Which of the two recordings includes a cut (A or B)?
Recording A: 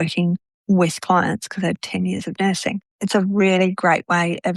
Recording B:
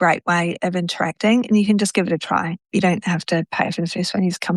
A